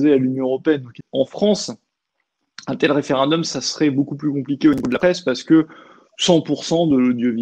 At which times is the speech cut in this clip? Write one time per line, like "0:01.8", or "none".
0:01.0